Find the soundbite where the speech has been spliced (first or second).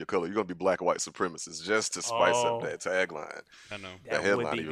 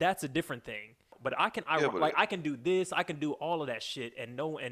second